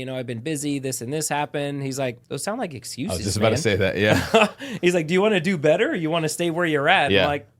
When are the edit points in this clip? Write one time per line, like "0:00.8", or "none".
0:02.3